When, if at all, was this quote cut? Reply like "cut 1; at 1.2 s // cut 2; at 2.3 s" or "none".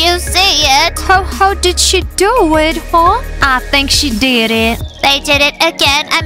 cut 1; at 1.0 s